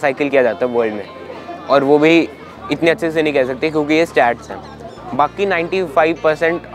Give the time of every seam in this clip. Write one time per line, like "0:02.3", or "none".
none